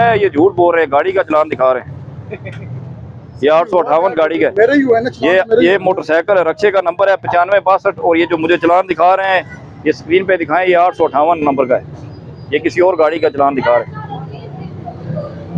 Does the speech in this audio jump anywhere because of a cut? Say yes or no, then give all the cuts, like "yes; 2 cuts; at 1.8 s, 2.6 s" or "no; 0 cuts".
no; 0 cuts